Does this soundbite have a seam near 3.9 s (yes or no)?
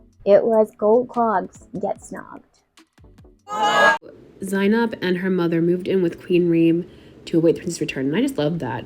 yes